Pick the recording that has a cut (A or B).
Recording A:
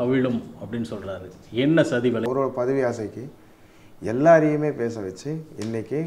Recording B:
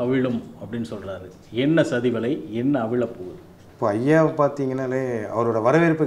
A